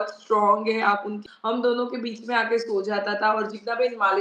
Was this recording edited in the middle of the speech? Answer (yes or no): yes